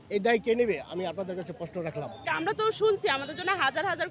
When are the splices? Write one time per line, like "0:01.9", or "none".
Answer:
0:02.2